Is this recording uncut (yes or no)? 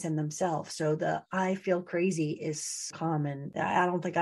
no